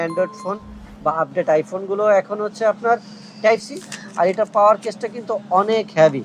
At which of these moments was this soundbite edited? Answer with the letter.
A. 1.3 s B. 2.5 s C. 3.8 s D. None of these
C